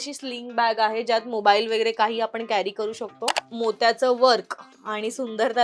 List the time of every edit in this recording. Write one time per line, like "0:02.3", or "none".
0:03.4